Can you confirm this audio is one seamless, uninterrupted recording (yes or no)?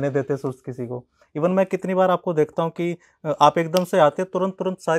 yes